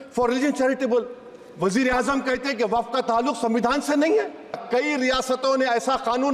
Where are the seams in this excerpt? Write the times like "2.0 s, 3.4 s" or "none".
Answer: 4.6 s